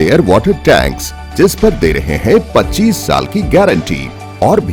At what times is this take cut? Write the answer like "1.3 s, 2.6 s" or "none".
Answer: none

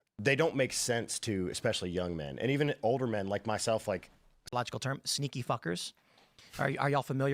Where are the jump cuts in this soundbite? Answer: 4.5 s

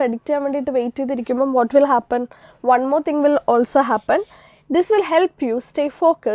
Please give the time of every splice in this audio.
none

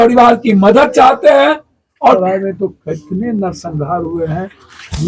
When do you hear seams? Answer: 2.2 s

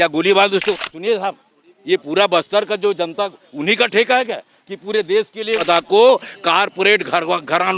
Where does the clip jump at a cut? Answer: 0.7 s, 5.6 s

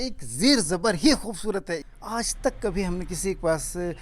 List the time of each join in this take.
1.7 s

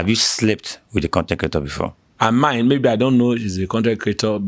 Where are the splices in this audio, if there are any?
2.0 s

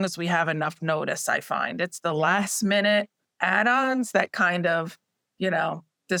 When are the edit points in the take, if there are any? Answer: none

